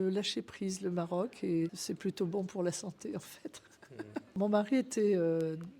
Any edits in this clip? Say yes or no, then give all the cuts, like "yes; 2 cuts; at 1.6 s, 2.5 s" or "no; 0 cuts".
yes; 2 cuts; at 1.8 s, 4.3 s